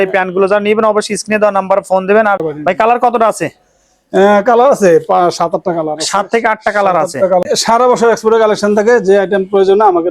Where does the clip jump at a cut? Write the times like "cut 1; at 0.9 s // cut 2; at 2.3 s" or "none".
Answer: cut 1; at 2.4 s // cut 2; at 7.4 s